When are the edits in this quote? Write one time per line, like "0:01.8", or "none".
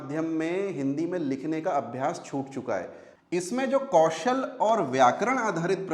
0:03.2